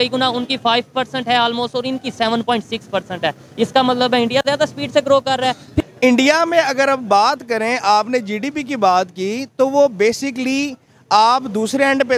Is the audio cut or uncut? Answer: cut